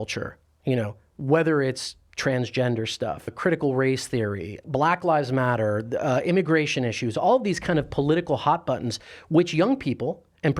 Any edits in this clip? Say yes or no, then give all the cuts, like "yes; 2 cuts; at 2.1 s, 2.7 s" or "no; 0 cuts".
yes; 2 cuts; at 3.3 s, 4.6 s